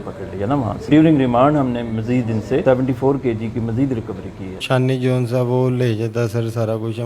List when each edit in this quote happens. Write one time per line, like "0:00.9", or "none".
0:00.9
0:02.6
0:04.6